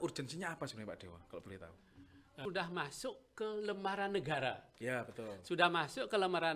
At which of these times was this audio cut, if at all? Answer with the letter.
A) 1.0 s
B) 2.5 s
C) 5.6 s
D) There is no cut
B